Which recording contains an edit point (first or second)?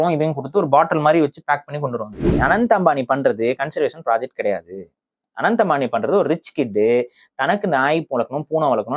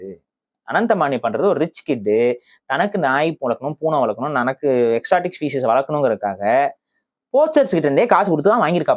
first